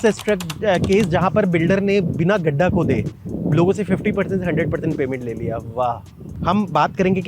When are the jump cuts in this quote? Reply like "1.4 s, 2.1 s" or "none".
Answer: 6.3 s